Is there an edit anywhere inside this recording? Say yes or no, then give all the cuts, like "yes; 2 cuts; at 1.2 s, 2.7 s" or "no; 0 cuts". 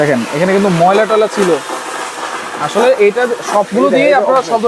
no; 0 cuts